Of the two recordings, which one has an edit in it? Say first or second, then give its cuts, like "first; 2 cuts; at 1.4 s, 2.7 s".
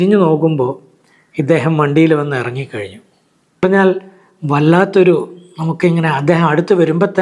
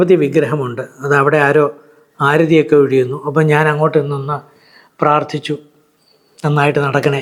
first; 1 cut; at 3.6 s